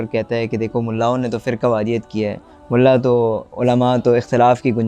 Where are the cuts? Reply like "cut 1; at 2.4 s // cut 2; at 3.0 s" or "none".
none